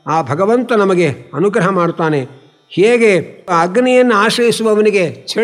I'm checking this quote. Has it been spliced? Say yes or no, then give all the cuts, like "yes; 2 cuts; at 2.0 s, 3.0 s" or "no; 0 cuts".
yes; 1 cut; at 3.5 s